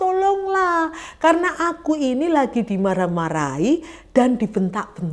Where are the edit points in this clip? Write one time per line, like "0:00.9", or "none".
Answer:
none